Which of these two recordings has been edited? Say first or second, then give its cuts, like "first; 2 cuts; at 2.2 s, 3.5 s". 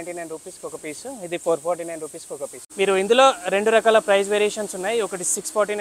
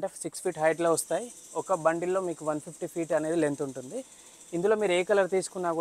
first; 1 cut; at 2.6 s